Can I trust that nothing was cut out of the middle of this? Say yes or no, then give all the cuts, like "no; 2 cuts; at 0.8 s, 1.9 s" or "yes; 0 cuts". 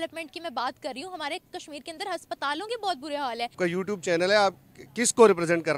no; 1 cut; at 3.6 s